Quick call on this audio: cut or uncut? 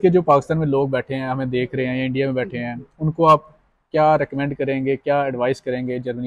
uncut